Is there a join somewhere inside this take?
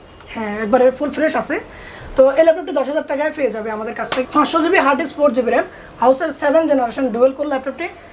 yes; 1 cut; at 4.2 s

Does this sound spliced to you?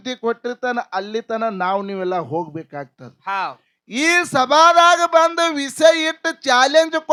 no; 0 cuts

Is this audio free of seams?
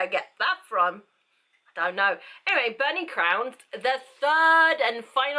yes; 0 cuts

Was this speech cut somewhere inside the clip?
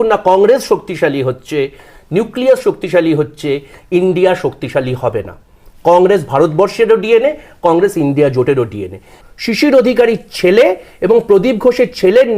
yes; 1 cut; at 9.1 s

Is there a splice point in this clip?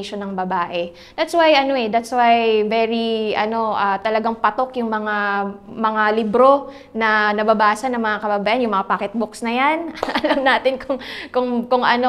no; 0 cuts

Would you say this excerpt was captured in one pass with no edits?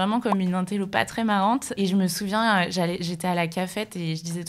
no; 1 cut; at 1.7 s

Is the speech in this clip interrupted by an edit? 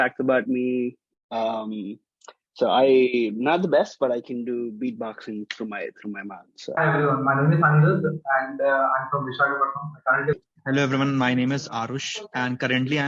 yes; 2 cuts; at 6.8 s, 10.3 s

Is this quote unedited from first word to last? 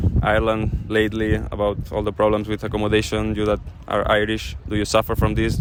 yes; 0 cuts

